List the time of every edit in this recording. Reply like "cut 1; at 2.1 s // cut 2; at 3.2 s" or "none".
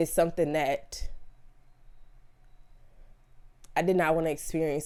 none